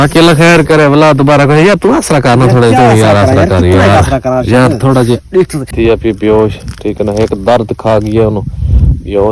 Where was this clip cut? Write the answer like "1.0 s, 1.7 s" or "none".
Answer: 5.7 s

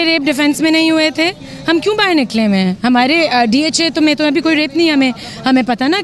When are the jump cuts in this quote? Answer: none

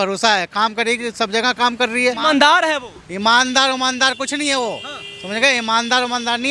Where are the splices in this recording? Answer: 2.2 s

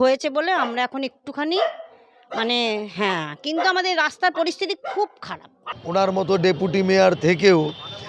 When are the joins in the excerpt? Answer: 5.8 s

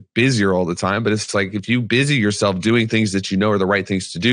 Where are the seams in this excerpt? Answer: none

